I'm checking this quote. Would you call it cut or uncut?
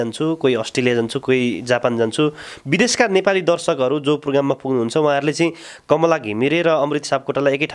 uncut